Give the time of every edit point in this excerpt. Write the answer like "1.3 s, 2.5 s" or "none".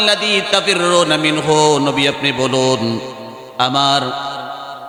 none

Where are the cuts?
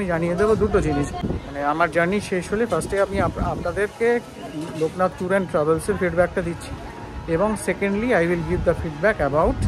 1.2 s

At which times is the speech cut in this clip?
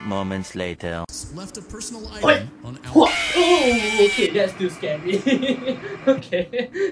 none

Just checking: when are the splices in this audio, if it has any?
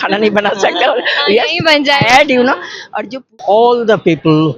3.1 s

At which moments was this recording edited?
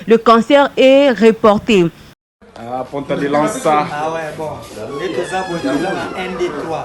2.0 s

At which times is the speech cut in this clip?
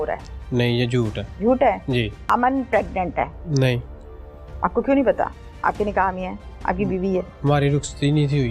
1.2 s, 2.2 s, 3.4 s

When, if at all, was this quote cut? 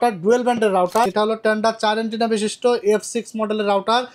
1.1 s

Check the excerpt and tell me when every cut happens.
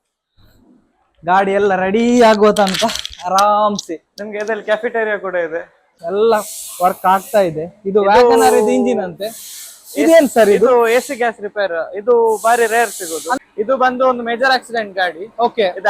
5.9 s, 13.4 s

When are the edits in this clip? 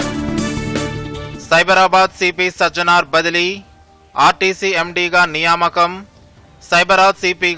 1.0 s

